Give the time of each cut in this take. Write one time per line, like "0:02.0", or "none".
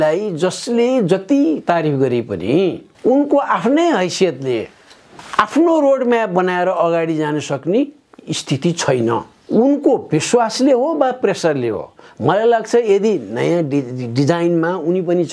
0:02.9
0:05.0
0:09.4